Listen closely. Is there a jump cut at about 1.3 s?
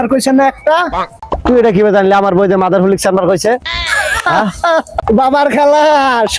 yes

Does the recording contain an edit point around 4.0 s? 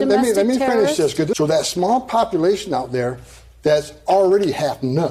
no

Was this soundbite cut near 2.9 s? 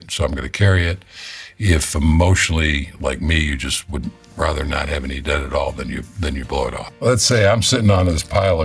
no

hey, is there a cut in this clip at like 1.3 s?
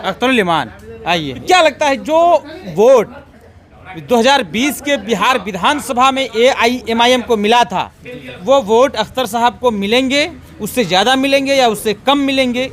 yes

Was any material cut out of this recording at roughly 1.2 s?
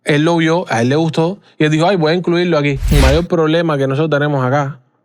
no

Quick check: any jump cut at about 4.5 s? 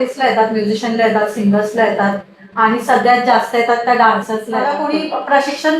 yes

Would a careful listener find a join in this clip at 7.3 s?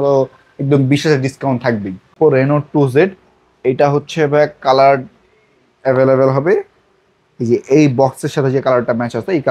no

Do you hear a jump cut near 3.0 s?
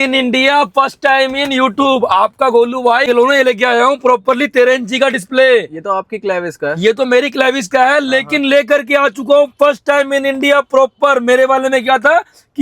yes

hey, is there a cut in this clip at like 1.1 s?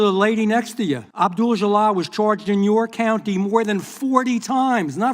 yes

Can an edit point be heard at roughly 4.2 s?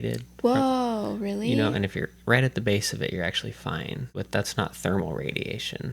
yes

